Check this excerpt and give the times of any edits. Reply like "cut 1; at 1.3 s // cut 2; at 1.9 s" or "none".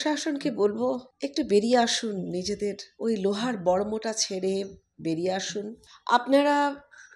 cut 1; at 1.1 s // cut 2; at 2.9 s // cut 3; at 5.9 s